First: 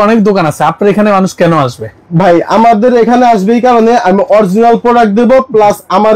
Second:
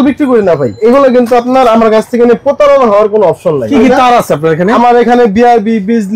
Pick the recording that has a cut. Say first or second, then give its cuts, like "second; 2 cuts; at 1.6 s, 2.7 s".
second; 2 cuts; at 0.8 s, 3.7 s